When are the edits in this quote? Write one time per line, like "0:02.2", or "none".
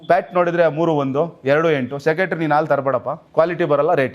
0:03.2